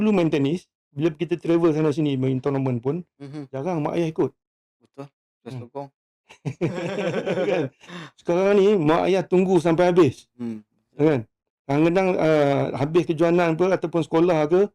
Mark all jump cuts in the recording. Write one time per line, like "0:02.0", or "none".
none